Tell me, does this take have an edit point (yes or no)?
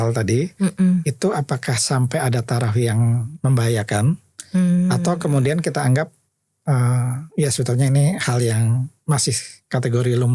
no